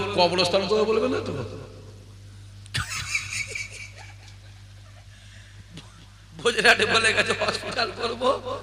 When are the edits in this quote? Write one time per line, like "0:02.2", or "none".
none